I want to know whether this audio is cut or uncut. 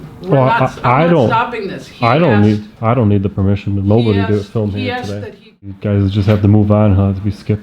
cut